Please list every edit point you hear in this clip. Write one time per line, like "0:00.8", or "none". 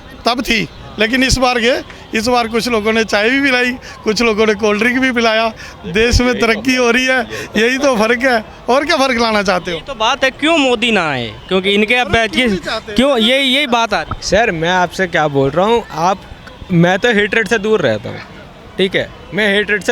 none